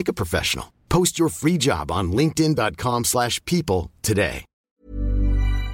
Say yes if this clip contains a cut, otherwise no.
yes